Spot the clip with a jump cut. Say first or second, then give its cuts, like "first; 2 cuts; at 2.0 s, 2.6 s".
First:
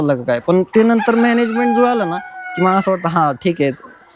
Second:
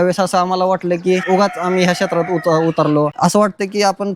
second; 2 cuts; at 1.2 s, 3.1 s